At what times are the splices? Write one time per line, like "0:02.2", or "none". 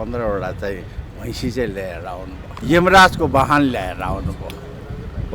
0:02.5